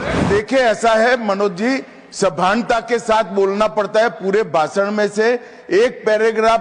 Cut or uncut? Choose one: uncut